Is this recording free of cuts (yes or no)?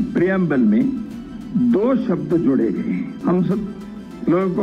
no